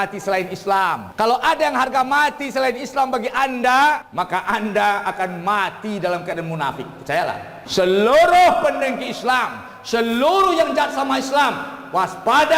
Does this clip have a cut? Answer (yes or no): yes